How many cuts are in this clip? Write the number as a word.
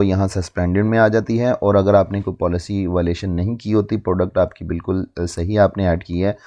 zero